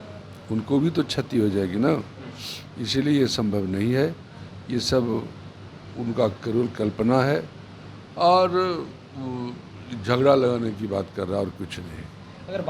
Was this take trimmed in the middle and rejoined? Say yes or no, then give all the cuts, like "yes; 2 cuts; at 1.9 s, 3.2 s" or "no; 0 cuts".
no; 0 cuts